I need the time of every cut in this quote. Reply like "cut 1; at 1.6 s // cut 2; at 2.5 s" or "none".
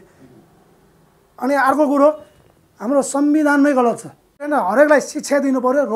cut 1; at 4.5 s

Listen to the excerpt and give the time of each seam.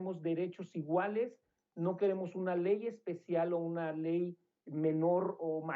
none

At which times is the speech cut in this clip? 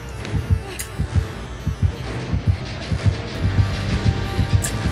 none

